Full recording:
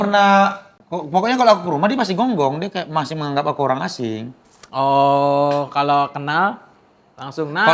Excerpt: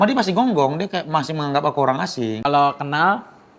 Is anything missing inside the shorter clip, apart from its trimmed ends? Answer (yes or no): yes